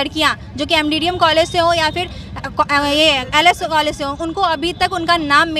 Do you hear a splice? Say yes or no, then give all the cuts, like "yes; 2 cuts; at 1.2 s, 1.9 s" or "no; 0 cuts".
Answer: no; 0 cuts